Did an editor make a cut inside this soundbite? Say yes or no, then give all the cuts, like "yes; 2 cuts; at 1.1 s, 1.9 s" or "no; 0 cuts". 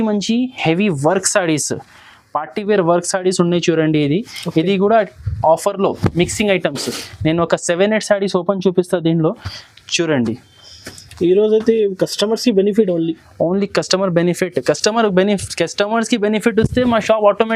no; 0 cuts